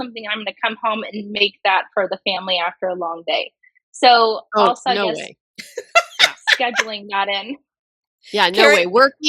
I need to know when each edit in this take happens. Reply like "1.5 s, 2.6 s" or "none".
none